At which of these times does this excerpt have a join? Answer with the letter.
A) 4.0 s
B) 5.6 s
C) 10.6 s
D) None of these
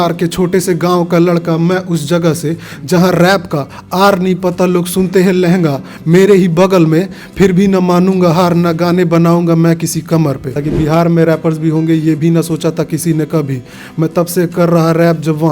C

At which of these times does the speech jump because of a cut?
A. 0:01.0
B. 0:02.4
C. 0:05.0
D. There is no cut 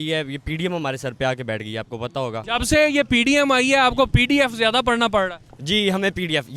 B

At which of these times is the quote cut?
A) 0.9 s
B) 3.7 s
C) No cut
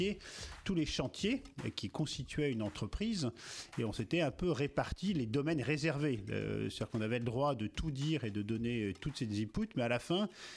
C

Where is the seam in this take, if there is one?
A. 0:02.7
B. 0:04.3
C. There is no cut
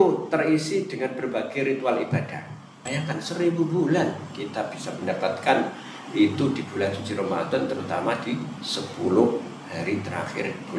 A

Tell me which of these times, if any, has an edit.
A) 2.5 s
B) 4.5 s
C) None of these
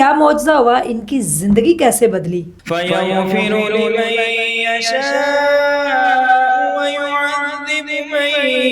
A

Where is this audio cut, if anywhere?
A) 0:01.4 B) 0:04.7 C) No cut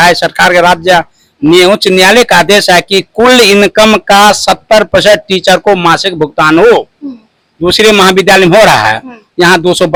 C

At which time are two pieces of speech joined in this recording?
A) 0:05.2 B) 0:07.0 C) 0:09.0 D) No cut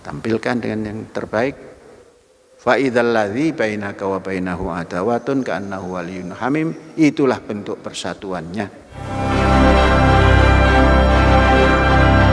C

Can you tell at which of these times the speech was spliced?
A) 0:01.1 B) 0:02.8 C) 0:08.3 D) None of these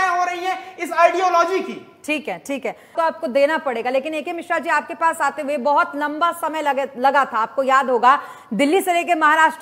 D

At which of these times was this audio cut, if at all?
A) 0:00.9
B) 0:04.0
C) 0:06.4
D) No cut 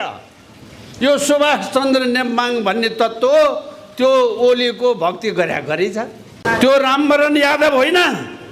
C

